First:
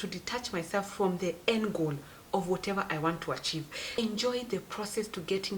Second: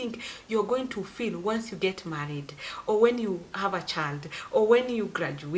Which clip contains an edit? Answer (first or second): first